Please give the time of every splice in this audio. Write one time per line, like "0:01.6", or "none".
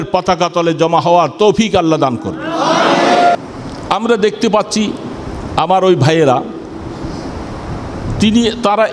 0:03.3